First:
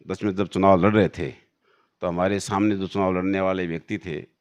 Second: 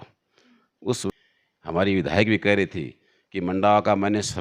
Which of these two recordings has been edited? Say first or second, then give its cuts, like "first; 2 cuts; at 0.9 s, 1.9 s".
second; 1 cut; at 1.0 s